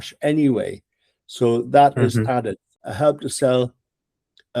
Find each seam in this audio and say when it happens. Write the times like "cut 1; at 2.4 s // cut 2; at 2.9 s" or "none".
cut 1; at 2.7 s